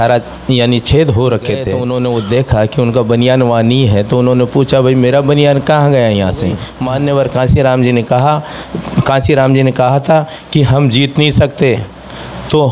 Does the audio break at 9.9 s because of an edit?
no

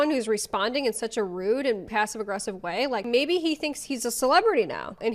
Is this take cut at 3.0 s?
yes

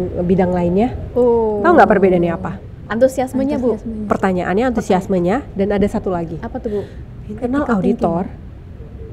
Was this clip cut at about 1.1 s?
no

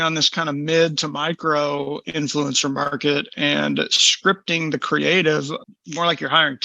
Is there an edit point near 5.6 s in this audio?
yes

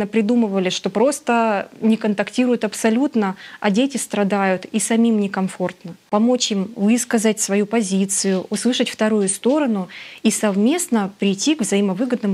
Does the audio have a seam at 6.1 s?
yes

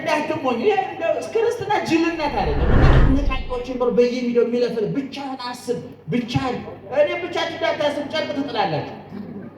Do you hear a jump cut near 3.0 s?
yes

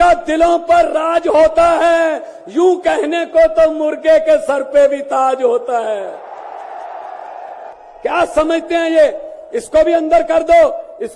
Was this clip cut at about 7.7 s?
yes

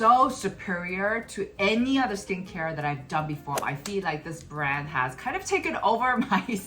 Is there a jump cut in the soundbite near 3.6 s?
yes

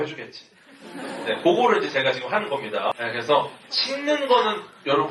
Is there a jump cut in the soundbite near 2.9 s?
yes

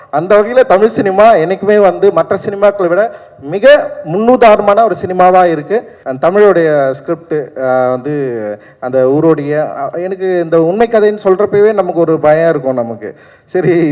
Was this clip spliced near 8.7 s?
no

